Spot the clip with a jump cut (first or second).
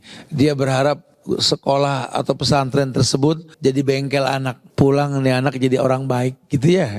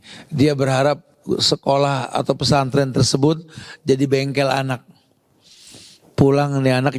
first